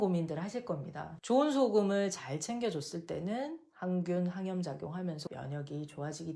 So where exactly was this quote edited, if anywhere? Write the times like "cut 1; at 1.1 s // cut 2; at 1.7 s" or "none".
none